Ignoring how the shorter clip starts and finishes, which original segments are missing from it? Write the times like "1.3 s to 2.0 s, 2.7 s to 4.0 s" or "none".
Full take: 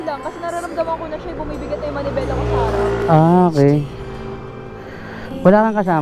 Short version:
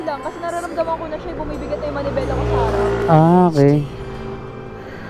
none